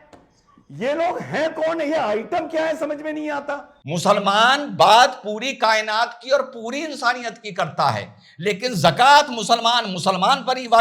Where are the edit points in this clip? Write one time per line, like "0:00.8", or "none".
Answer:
0:03.7